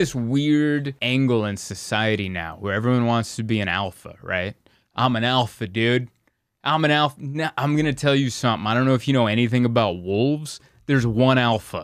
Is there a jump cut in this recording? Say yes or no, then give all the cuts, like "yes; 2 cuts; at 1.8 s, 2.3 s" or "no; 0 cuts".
yes; 1 cut; at 1.0 s